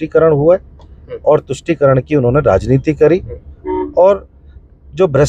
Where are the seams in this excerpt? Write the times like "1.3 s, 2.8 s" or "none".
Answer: none